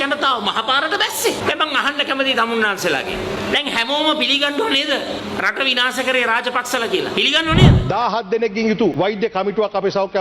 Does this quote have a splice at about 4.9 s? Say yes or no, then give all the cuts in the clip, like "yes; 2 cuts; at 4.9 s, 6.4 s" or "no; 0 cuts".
no; 2 cuts; at 7.8 s, 8.9 s